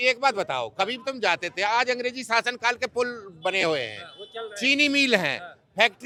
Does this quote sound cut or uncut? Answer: uncut